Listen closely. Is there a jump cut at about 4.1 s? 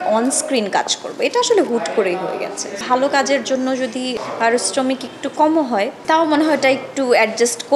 yes; 3 cuts; at 2.8 s, 4.1 s, 6.0 s

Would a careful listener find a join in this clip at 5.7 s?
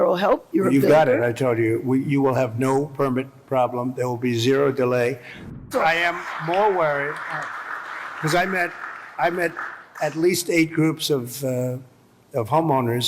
yes; 1 cut; at 5.7 s

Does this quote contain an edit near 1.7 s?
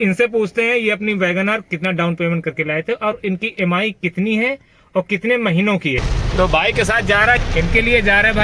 no; 2 cuts; at 6.0 s, 7.4 s

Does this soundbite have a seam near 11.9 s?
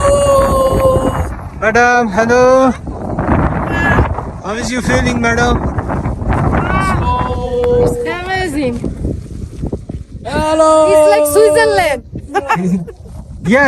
no; 0 cuts

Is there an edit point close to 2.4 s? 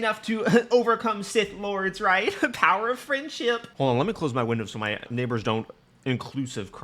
no; 2 cuts; at 5.1 s, 5.8 s

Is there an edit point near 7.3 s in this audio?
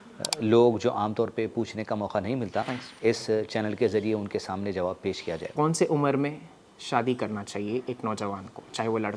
no; 1 cut; at 5.5 s

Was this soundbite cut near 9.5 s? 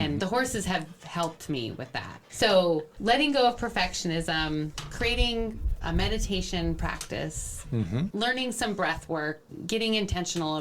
yes; 3 cuts; at 2.3 s, 8.1 s, 9.5 s

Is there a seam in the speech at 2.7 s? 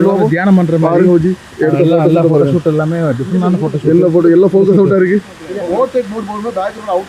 no; 1 cut; at 5.4 s

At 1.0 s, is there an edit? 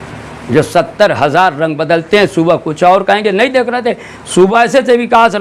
no; 1 cut; at 4.5 s

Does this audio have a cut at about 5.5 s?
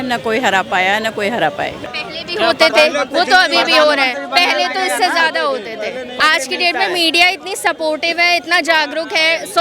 no; 1 cut; at 1.8 s

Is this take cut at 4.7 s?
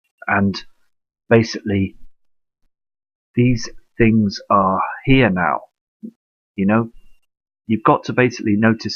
no; 1 cut; at 3.4 s

